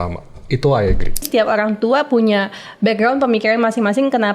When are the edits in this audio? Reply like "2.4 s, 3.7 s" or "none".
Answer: 1.3 s